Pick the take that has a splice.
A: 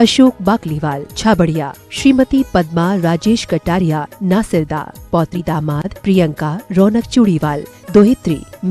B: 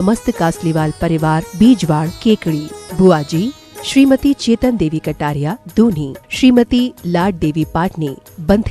A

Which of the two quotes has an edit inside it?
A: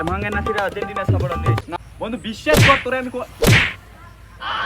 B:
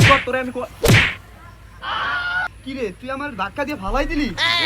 A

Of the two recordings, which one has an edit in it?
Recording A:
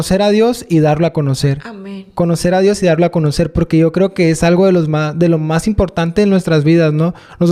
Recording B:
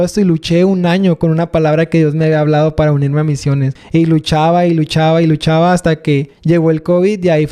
B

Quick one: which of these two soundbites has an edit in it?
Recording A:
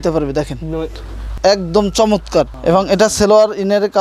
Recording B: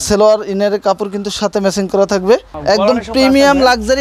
B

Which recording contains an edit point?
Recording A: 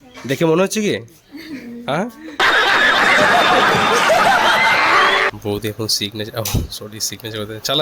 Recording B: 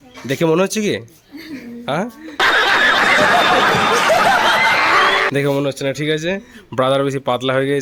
A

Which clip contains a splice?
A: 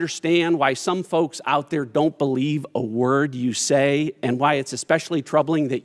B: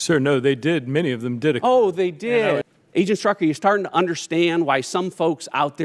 B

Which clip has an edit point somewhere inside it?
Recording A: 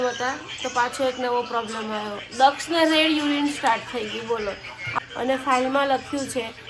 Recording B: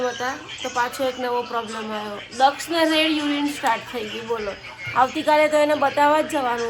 A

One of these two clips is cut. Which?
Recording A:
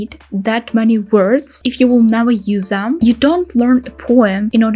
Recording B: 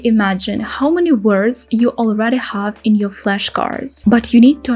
A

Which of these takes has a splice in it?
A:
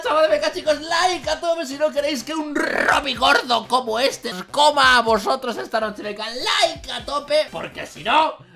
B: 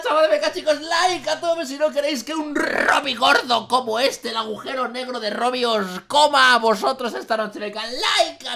A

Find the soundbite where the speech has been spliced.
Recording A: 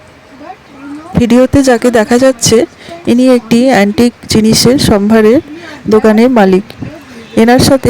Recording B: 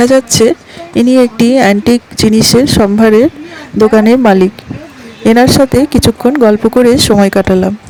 A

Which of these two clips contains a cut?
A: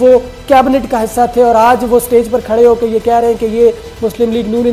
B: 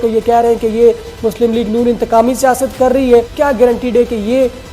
B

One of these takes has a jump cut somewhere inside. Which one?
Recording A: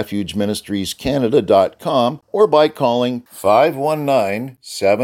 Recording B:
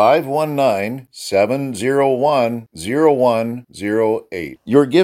A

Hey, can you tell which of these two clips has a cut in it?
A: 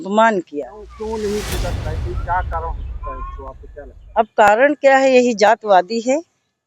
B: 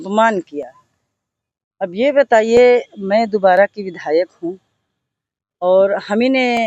A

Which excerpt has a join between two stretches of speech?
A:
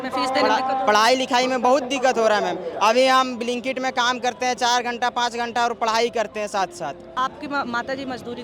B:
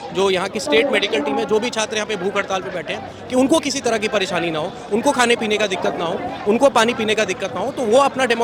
A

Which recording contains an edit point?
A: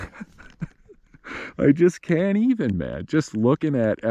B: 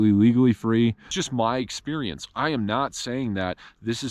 B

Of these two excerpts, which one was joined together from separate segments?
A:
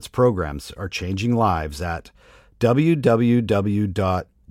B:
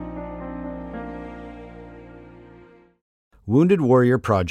B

